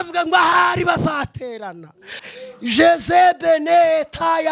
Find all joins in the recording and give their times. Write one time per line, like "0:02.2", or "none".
0:02.2